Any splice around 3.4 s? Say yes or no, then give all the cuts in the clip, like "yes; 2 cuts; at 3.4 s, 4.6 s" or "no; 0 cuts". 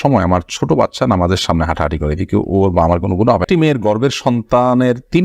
yes; 1 cut; at 3.4 s